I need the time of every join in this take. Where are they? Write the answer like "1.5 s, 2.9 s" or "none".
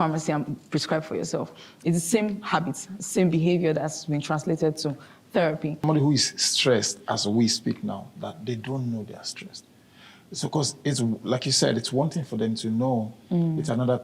5.8 s